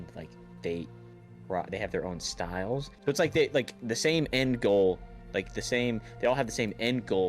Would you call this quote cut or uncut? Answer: cut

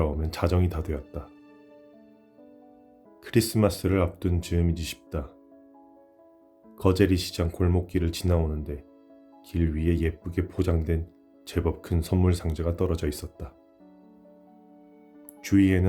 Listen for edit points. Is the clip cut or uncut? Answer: cut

